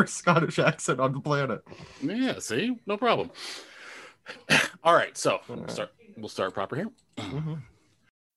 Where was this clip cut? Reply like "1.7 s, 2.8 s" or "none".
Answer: none